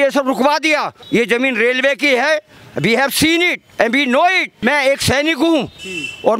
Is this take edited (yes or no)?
yes